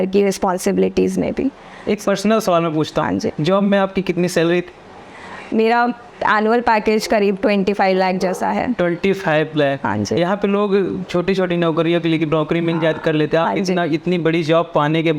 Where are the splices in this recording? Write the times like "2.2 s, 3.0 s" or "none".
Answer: none